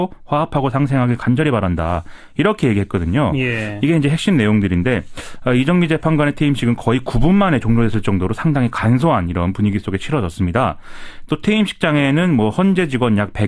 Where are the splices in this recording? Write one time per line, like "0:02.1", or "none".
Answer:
none